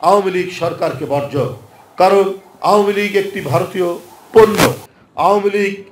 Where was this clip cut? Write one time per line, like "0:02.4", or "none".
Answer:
0:04.9